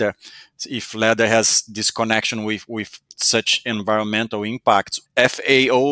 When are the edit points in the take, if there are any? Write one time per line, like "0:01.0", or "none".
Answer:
0:05.0